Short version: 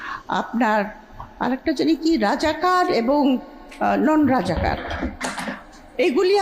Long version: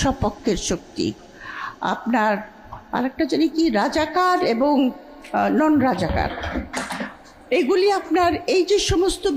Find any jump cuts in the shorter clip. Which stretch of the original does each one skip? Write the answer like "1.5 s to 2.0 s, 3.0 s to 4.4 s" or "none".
none